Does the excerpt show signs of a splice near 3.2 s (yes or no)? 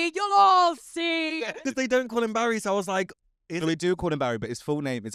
no